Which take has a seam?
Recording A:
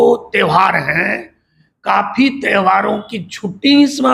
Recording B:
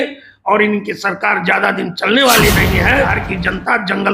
B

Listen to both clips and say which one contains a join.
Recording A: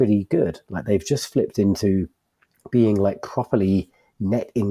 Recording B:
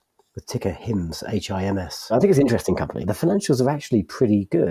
B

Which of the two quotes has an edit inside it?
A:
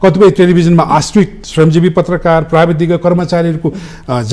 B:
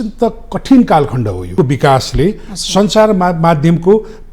B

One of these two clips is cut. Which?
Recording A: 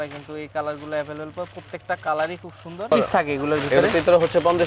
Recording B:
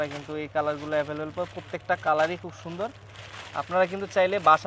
A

